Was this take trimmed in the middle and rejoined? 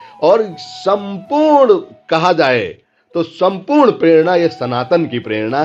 no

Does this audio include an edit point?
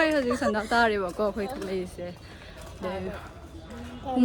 no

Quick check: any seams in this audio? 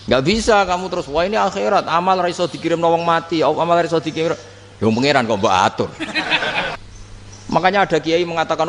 yes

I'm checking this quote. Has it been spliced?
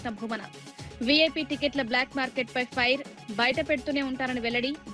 no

